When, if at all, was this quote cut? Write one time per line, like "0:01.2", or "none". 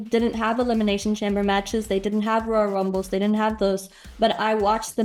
none